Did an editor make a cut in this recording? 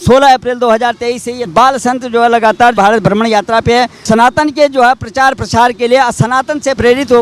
yes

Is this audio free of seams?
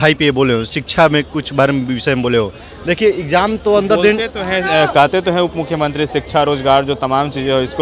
yes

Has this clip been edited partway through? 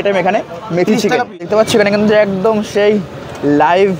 yes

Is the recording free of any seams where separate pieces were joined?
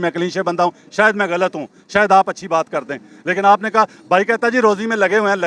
yes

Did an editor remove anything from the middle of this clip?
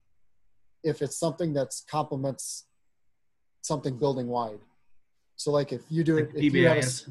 no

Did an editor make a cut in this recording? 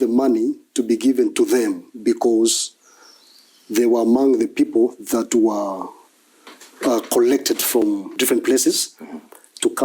yes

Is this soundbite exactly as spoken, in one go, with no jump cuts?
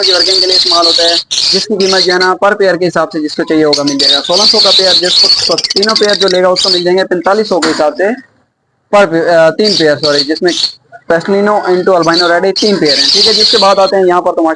yes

